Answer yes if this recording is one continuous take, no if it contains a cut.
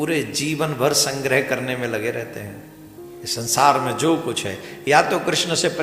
no